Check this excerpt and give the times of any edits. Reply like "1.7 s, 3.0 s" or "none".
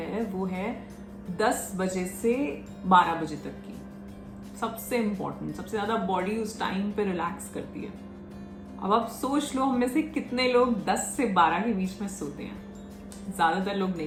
none